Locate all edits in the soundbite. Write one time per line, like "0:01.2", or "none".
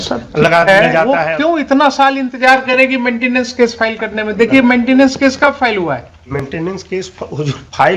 0:01.2